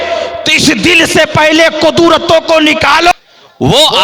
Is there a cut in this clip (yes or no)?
yes